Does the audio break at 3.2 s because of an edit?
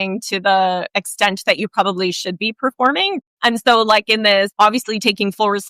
yes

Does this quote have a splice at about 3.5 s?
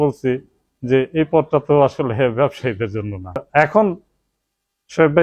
yes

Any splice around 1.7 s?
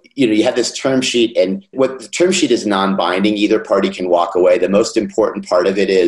yes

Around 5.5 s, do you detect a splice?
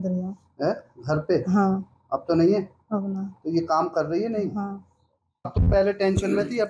yes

